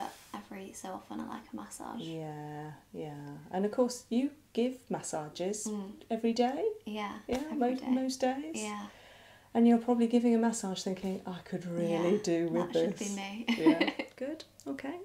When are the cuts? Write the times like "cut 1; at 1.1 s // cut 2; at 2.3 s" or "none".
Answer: cut 1; at 14.1 s